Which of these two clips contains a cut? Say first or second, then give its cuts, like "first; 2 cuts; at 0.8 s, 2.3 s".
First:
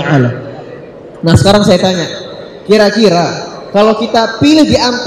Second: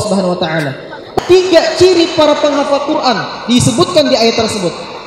second; 1 cut; at 1.1 s